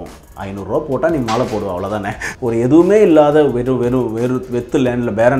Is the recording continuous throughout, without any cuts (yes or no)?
no